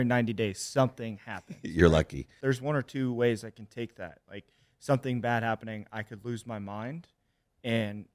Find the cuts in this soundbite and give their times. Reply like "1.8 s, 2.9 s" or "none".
2.2 s